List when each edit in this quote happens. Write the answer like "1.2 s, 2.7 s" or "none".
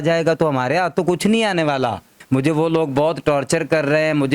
2.1 s